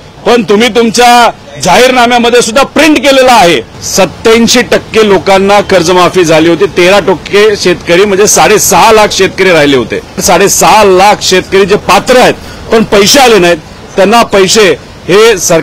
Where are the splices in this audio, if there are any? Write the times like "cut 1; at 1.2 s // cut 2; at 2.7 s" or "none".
cut 1; at 3.8 s // cut 2; at 10.2 s